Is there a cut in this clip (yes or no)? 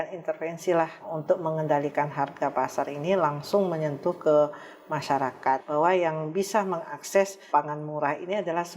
yes